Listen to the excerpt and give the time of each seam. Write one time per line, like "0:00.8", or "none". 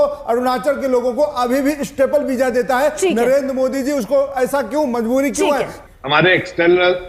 0:05.8

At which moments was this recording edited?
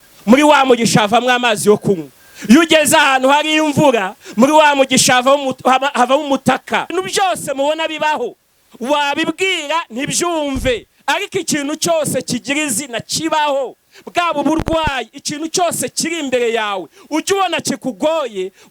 0:06.9

